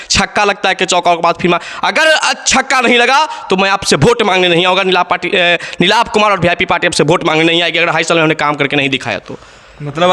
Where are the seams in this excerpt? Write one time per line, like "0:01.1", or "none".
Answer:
none